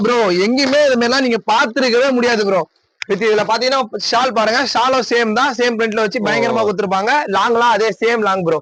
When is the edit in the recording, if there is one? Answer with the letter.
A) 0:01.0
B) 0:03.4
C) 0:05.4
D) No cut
D